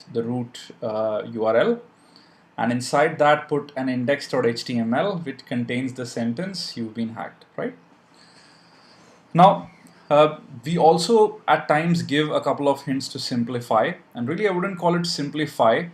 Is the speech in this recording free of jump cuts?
yes; 0 cuts

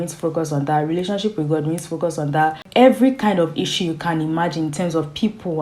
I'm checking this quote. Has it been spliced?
yes; 1 cut; at 2.6 s

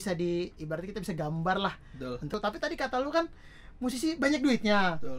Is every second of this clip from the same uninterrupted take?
no; 1 cut; at 2.4 s

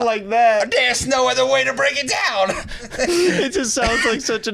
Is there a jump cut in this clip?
yes; 1 cut; at 2.8 s

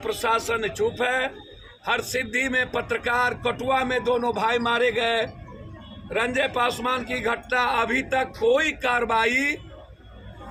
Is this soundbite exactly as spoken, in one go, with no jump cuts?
yes; 0 cuts

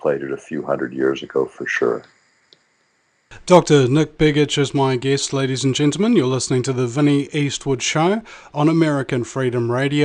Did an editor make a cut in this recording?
yes; 1 cut; at 6.1 s

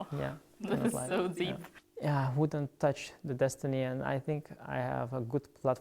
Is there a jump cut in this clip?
yes; 1 cut; at 1.8 s

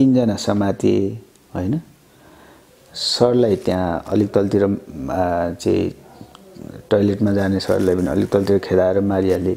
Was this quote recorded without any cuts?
yes; 0 cuts

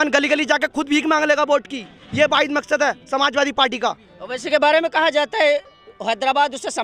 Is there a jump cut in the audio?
no; 0 cuts

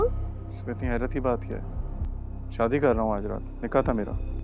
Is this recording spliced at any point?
no; 0 cuts

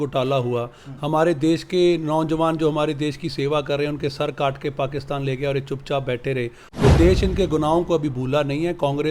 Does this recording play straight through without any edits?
yes; 0 cuts

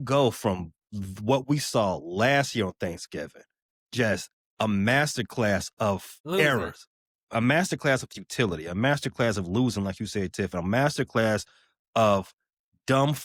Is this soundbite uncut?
yes; 0 cuts

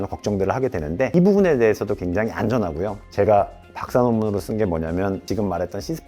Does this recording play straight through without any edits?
no; 2 cuts; at 1.1 s, 5.2 s

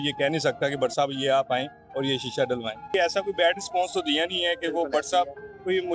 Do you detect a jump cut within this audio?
yes; 1 cut; at 2.9 s

